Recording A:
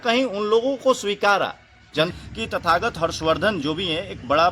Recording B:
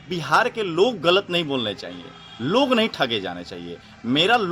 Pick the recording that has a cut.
A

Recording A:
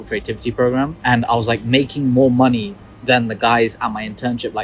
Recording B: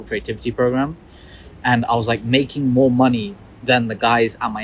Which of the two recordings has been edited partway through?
A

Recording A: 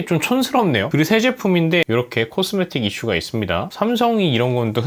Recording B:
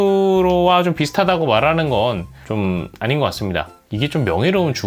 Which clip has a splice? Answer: A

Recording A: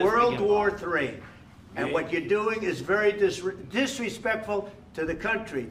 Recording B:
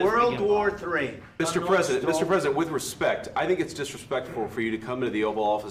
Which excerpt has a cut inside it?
B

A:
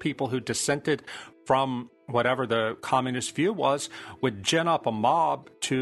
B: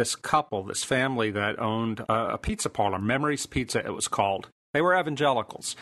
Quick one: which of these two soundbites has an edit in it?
B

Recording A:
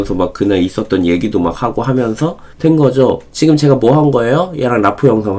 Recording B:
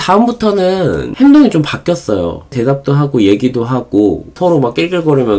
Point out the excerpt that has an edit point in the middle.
B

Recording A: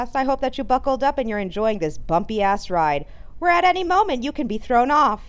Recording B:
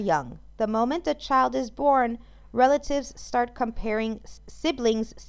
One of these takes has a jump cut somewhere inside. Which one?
B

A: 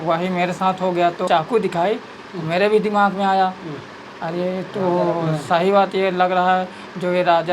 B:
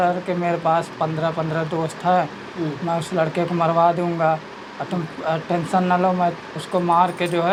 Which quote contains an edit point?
A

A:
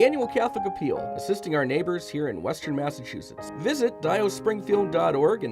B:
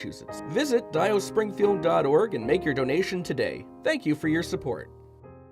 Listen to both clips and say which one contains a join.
B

